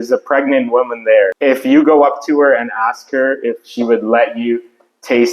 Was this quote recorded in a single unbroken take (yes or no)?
no